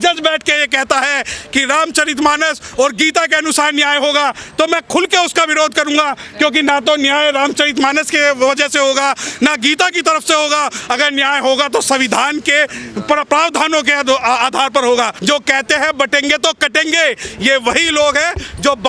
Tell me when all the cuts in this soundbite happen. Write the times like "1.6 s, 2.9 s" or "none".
15.2 s